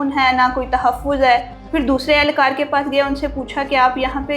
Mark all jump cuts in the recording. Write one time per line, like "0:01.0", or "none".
0:01.6